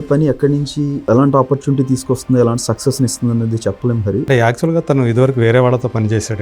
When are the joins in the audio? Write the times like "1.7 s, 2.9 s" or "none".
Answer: 1.1 s, 4.3 s